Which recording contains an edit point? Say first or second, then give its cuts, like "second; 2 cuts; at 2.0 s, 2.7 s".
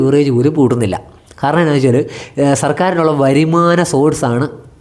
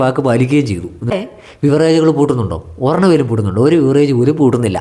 second; 1 cut; at 1.1 s